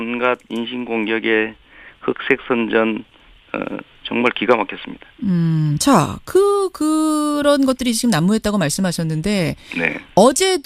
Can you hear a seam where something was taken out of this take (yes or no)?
yes